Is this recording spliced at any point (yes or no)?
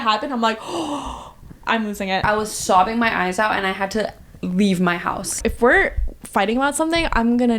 yes